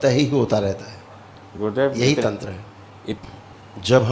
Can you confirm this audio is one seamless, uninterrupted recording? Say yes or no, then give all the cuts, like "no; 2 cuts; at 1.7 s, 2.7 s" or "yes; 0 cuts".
no; 1 cut; at 3.2 s